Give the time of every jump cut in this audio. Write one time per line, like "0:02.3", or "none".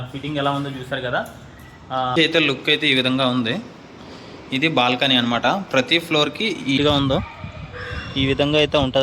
0:02.1
0:06.8